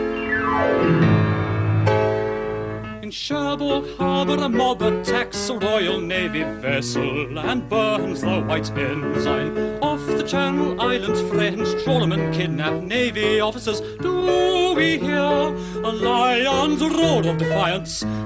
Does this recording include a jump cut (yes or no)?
yes